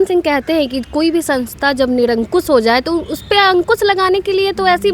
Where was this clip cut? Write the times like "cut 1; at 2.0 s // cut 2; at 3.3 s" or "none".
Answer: none